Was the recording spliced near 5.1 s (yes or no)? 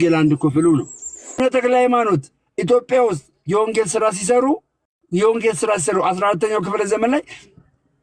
no